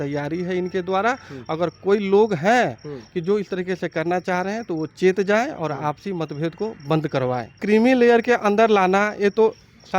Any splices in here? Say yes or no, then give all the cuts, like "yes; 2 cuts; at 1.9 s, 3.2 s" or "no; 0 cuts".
yes; 1 cut; at 7.5 s